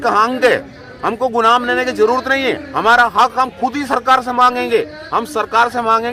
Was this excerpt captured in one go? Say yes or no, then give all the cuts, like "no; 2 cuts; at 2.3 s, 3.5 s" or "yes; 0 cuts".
yes; 0 cuts